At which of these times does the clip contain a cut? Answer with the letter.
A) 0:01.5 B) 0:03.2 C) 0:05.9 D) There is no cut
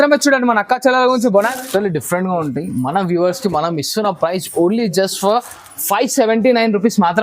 A